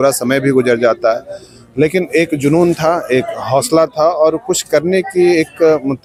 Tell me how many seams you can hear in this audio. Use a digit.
0